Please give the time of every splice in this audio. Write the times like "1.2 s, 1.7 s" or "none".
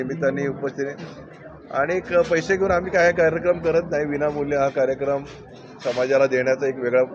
none